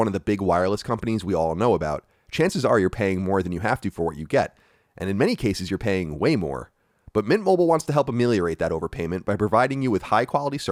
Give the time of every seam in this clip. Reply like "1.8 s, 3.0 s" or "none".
none